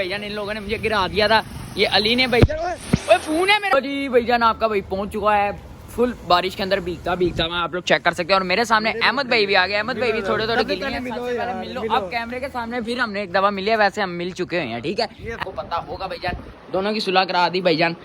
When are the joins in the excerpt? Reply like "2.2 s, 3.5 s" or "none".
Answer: 3.7 s, 15.4 s